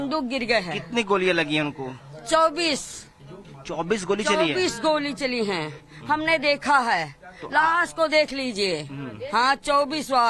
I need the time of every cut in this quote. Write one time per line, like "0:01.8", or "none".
0:06.4